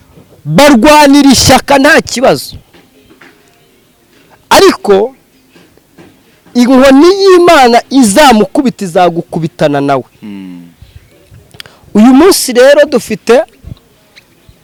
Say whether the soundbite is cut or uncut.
uncut